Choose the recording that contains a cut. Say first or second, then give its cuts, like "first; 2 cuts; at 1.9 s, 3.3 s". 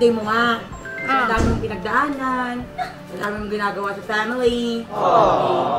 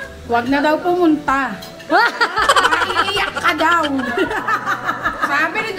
first; 1 cut; at 4.9 s